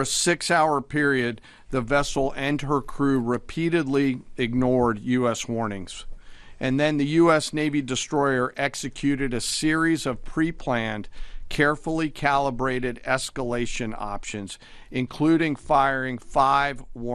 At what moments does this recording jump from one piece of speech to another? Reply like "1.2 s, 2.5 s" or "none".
none